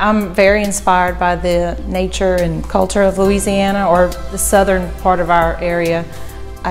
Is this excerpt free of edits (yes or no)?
yes